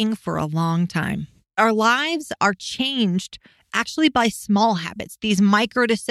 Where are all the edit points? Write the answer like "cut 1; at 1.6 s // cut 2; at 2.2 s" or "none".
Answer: cut 1; at 1.6 s